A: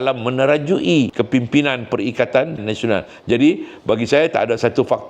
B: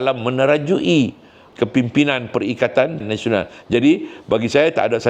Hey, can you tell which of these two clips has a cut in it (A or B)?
A